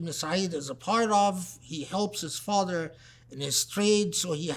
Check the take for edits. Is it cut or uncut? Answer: uncut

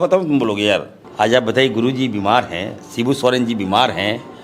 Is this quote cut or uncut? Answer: cut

